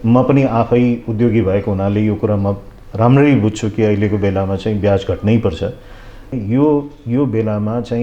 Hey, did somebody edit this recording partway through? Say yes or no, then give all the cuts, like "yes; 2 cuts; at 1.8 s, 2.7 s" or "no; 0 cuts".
yes; 1 cut; at 6.3 s